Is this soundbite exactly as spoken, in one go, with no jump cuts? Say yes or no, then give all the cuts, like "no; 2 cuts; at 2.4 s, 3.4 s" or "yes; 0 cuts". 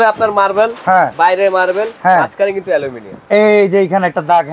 yes; 0 cuts